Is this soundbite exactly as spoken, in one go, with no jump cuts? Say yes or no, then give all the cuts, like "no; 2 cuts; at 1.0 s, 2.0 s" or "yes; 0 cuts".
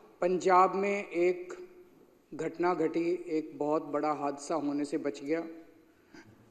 yes; 0 cuts